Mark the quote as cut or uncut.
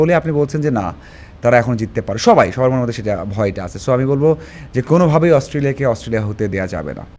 uncut